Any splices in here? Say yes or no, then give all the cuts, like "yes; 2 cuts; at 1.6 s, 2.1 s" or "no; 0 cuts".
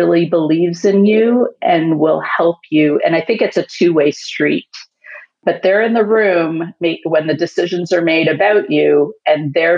no; 0 cuts